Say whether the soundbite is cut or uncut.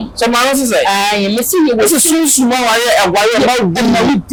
uncut